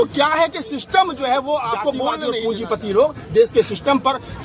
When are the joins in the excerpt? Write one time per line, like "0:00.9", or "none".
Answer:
0:02.2